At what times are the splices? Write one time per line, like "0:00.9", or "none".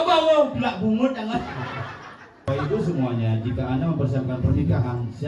0:02.5